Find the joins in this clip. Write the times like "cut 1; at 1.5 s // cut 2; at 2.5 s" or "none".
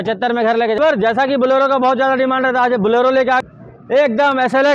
cut 1; at 0.8 s // cut 2; at 3.4 s